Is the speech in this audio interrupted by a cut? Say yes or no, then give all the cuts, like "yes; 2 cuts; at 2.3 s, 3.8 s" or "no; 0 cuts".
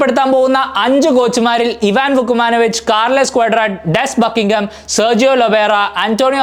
no; 0 cuts